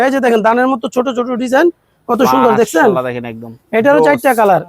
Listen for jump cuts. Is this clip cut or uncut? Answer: uncut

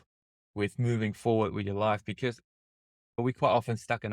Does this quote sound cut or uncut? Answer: cut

